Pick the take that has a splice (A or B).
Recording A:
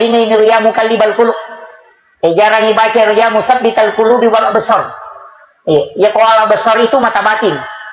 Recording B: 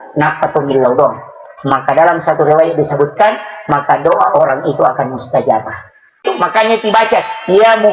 B